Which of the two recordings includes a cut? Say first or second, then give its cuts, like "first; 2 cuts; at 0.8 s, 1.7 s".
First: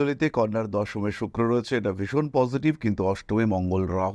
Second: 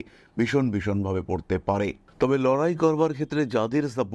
second; 1 cut; at 2.1 s